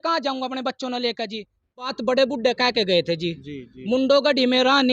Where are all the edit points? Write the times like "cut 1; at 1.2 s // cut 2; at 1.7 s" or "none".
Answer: cut 1; at 2.0 s